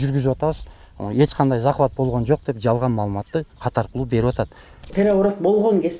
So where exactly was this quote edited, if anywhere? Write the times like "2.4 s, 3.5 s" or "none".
4.9 s